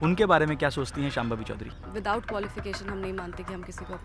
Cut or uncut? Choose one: cut